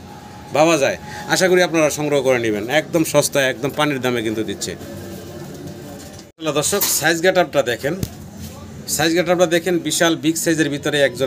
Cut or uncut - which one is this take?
uncut